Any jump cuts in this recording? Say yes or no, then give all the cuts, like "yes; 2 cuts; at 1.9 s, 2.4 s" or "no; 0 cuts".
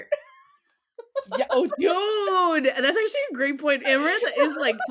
no; 0 cuts